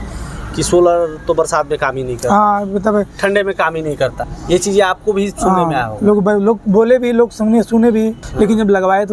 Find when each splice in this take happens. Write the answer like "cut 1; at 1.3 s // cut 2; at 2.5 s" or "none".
cut 1; at 4.3 s // cut 2; at 8.2 s